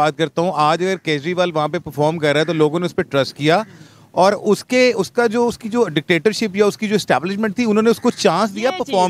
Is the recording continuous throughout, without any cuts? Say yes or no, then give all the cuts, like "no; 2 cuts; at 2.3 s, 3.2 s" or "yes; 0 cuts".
yes; 0 cuts